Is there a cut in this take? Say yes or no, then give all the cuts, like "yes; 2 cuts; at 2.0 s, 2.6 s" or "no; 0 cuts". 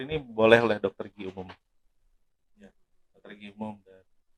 no; 0 cuts